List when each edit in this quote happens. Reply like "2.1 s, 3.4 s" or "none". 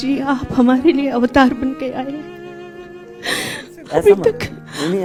none